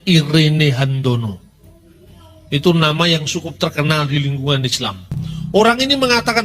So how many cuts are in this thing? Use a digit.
1